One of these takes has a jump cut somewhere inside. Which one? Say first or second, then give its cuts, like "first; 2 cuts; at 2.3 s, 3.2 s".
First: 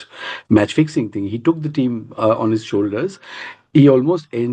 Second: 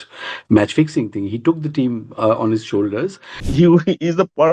second; 1 cut; at 3.5 s